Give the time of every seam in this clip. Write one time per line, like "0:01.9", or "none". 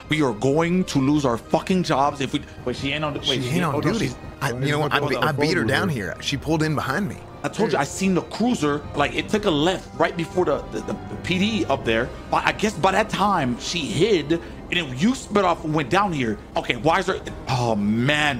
0:04.2
0:07.2
0:08.9
0:16.4